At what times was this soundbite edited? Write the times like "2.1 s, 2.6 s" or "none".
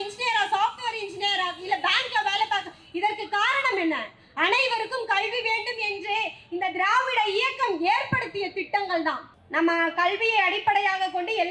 9.3 s